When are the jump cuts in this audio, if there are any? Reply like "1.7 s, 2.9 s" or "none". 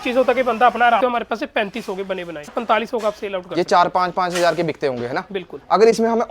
1.0 s, 2.4 s